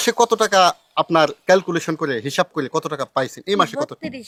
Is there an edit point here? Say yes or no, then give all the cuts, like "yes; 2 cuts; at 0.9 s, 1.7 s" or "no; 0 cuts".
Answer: no; 0 cuts